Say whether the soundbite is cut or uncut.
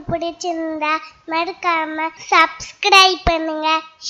cut